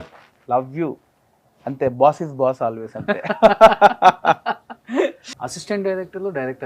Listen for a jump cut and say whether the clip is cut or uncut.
cut